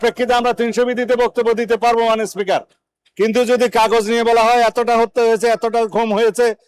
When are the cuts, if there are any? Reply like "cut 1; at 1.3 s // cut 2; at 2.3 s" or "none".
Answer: none